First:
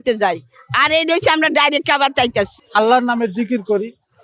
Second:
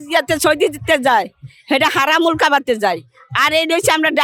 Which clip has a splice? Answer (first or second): first